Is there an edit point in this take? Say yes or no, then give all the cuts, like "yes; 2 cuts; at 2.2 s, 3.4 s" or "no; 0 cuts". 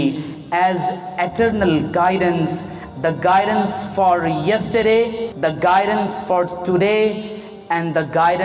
yes; 1 cut; at 5.2 s